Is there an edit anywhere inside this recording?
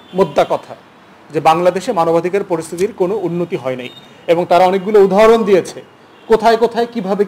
no; 0 cuts

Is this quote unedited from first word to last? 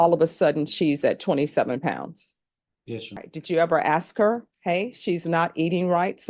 no; 1 cut; at 3.2 s

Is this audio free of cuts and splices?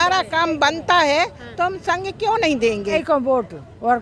no; 1 cut; at 2.9 s

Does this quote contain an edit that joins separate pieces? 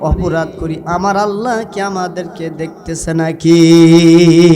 no; 0 cuts

